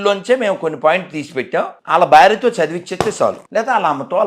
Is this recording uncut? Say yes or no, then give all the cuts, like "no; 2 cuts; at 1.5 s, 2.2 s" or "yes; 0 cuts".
no; 2 cuts; at 1.8 s, 3.4 s